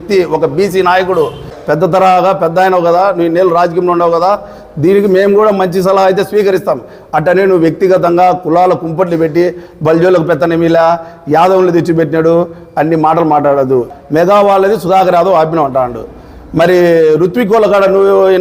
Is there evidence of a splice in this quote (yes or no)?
yes